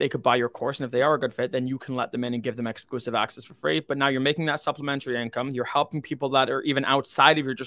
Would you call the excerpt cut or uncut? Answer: uncut